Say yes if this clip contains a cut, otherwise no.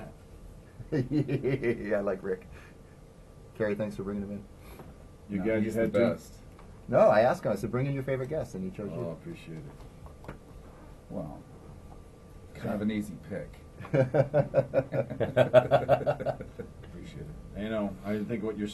no